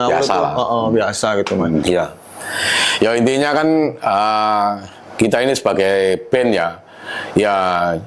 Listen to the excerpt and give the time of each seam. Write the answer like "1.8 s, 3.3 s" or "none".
1.8 s